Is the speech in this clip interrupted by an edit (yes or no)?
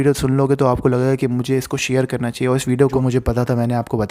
yes